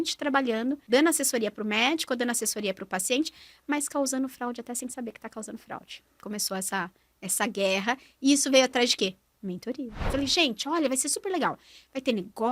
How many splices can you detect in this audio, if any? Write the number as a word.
three